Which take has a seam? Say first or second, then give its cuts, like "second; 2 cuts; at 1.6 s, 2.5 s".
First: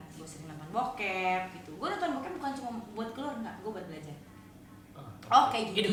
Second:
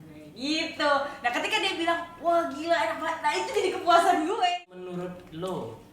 second; 1 cut; at 4.5 s